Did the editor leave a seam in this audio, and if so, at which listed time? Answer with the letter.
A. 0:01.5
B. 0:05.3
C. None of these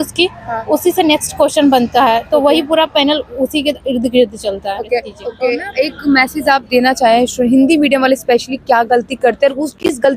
B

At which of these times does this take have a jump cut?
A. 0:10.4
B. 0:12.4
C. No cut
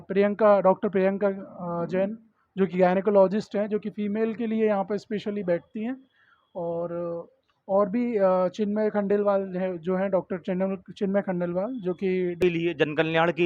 B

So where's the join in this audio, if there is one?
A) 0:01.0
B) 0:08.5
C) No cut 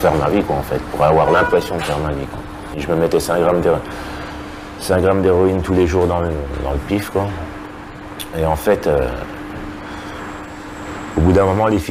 C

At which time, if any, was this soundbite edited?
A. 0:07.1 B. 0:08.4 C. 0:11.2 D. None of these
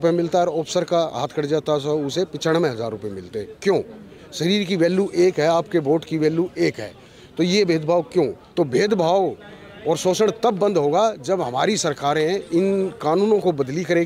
B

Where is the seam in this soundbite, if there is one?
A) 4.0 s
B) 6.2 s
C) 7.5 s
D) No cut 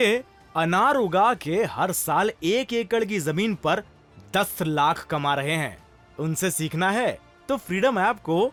D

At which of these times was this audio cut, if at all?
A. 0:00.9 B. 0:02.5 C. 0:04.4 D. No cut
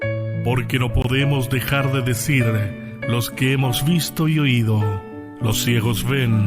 A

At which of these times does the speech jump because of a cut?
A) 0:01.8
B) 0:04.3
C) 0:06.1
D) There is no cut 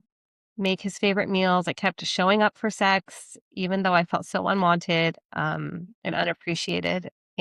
D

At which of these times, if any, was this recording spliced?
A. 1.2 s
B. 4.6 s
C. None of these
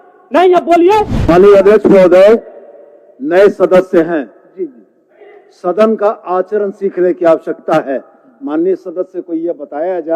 A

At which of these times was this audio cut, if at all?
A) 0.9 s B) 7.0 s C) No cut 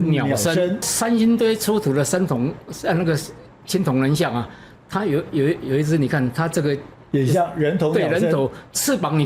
A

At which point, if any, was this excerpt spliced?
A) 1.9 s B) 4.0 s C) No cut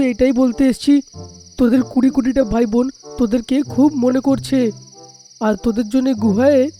C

